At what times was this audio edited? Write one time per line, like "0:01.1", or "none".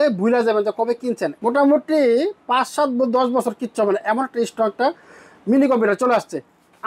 none